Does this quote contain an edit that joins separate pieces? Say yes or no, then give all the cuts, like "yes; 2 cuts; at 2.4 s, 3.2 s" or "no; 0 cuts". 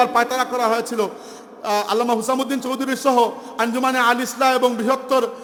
no; 0 cuts